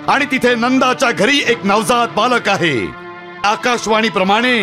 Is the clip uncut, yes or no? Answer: no